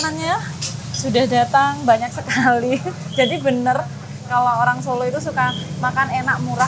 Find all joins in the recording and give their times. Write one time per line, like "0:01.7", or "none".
none